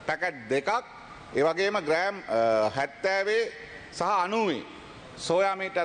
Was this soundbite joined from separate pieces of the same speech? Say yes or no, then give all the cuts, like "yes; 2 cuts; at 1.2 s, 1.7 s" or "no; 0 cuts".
no; 0 cuts